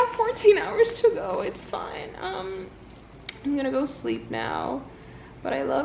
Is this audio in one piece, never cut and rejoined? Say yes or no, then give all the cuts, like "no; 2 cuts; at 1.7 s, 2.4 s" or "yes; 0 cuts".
yes; 0 cuts